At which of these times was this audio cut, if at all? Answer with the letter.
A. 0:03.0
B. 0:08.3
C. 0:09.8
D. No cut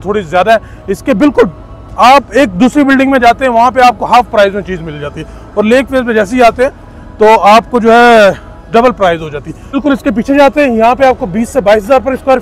C